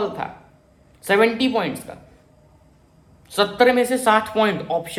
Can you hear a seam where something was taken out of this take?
no; 0 cuts

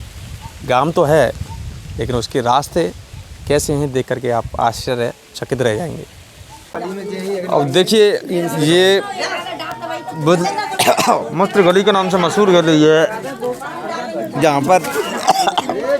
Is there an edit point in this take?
yes; 1 cut; at 6.8 s

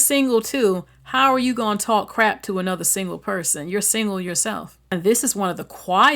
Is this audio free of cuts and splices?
no; 1 cut; at 4.7 s

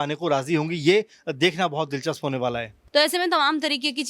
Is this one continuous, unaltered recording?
no; 1 cut; at 2.7 s

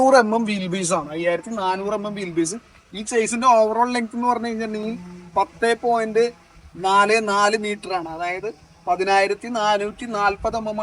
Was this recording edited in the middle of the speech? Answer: no; 0 cuts

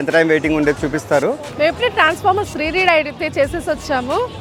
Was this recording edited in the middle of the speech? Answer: yes; 1 cut; at 1.4 s

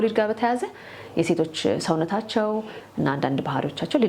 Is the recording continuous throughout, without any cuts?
yes; 0 cuts

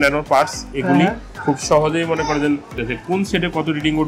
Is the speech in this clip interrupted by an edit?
yes; 1 cut; at 2.8 s

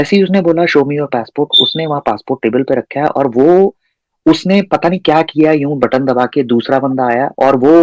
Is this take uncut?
yes; 0 cuts

